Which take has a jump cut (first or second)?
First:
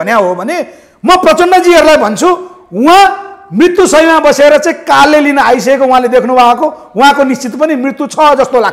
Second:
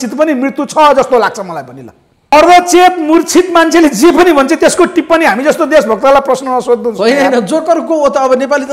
second